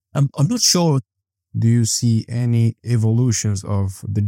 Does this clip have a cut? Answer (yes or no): yes